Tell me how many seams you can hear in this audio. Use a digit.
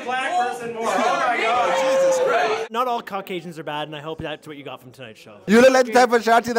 2